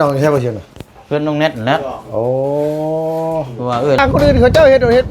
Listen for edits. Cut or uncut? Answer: cut